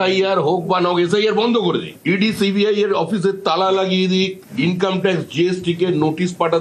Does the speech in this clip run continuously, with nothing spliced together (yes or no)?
yes